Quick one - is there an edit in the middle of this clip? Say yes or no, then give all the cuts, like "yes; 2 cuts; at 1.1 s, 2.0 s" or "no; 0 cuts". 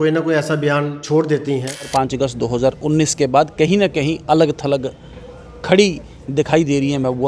yes; 1 cut; at 1.9 s